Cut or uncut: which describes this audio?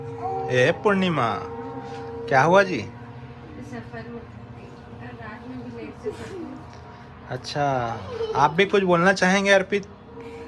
uncut